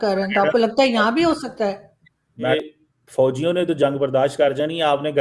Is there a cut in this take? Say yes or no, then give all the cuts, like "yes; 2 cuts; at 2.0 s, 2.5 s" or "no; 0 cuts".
yes; 1 cut; at 2.5 s